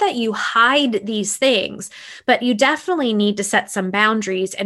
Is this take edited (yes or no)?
no